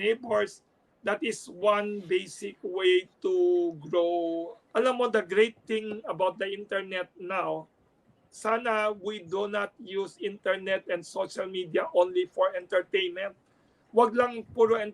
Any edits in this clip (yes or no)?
yes